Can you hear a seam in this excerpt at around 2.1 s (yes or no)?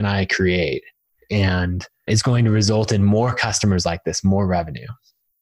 yes